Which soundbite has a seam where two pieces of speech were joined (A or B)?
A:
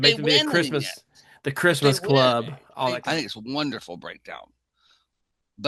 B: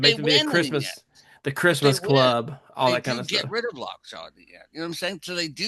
A